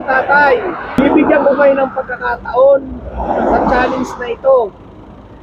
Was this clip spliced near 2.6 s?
no; 1 cut; at 1.0 s

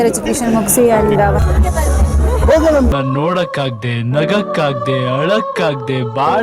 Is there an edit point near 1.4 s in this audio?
yes; 1 cut; at 1.4 s

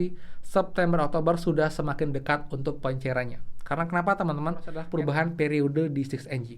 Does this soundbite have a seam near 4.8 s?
yes; 1 cut; at 4.8 s

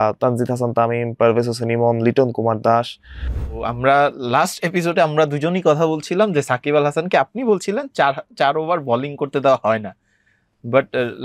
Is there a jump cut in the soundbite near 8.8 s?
no; 1 cut; at 3.5 s

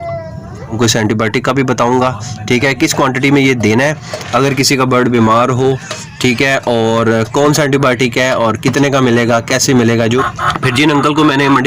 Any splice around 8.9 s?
no; 2 cuts; at 0.8 s, 10.2 s

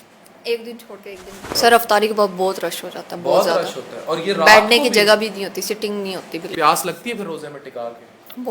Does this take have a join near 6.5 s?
yes; 2 cuts; at 1.5 s, 6.5 s

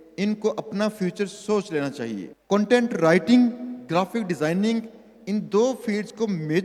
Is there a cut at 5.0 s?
no; 1 cut; at 2.3 s

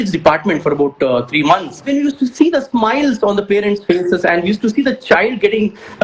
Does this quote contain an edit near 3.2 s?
no; 1 cut; at 1.9 s

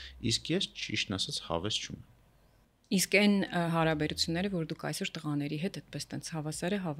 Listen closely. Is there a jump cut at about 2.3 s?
no; 0 cuts

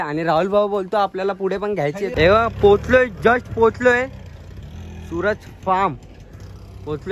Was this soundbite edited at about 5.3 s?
no; 1 cut; at 2.1 s

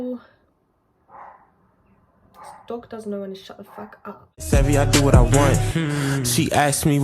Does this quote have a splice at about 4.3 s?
yes; 1 cut; at 4.3 s

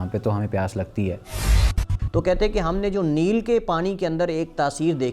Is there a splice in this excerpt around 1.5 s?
yes; 1 cut; at 1.5 s

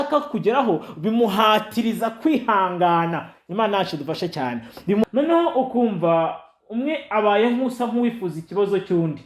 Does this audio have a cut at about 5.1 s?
yes; 1 cut; at 5.1 s

